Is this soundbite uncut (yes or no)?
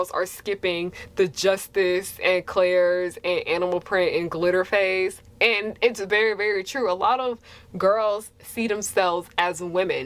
yes